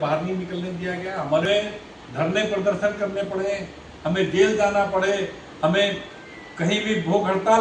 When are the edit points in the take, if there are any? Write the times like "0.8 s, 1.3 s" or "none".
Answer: 1.5 s